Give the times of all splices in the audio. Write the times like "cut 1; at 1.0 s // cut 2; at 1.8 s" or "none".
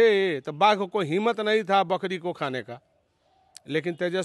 none

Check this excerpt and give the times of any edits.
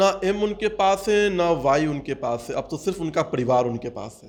none

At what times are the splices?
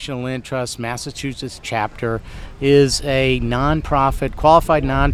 none

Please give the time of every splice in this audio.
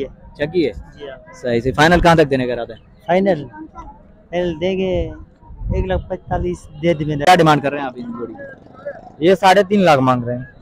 cut 1; at 7.2 s

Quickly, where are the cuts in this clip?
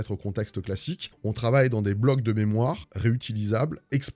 none

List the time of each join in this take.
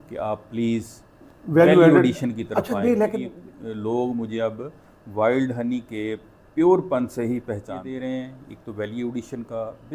cut 1; at 3.3 s // cut 2; at 7.8 s

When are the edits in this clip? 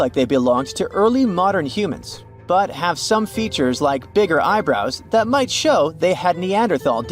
none

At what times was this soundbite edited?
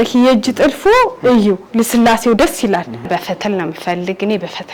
cut 1; at 3.1 s

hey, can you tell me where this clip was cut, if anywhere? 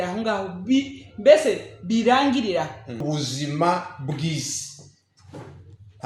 cut 1; at 3.0 s

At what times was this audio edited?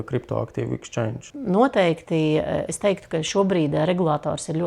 cut 1; at 1.3 s

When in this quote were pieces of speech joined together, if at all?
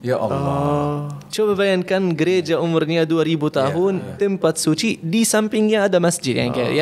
none

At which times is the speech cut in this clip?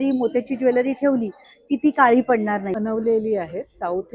cut 1; at 2.7 s

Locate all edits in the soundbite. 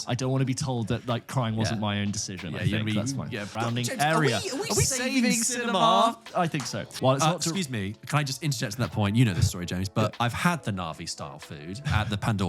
cut 1; at 3.5 s // cut 2; at 6.8 s

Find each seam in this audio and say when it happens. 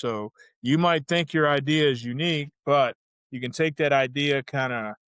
none

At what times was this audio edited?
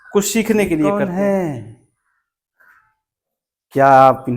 cut 1; at 0.9 s

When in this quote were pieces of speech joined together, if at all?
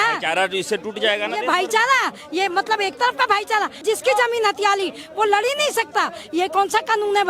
cut 1; at 3.8 s

